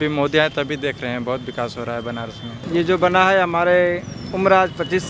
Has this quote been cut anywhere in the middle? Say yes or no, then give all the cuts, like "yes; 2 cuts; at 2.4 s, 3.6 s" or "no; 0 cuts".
yes; 1 cut; at 2.6 s